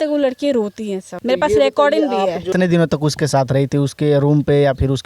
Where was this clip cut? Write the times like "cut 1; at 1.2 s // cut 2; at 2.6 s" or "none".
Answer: cut 1; at 1.1 s // cut 2; at 2.5 s